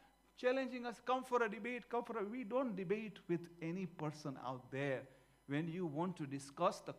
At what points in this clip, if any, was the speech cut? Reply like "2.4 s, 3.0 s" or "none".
2.0 s